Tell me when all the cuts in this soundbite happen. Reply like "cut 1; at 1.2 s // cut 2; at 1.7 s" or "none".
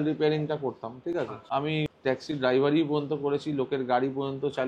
cut 1; at 1.7 s